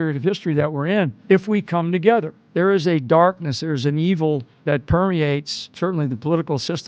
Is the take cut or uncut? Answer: cut